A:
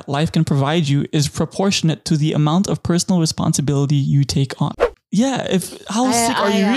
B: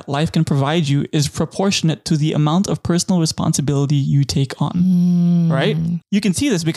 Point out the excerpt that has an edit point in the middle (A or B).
A